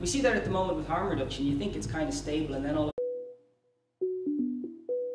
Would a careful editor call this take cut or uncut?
uncut